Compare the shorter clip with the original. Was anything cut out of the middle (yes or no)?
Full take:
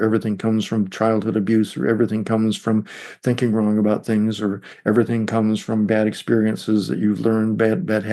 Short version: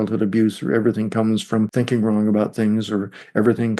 yes